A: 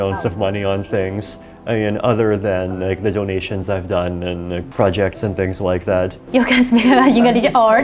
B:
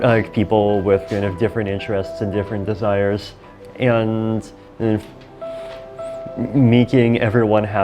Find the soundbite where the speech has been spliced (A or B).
A